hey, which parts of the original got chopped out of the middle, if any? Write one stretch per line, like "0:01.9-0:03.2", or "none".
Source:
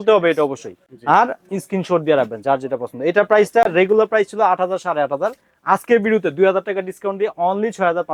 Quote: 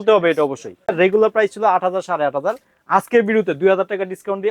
0:00.9-0:03.7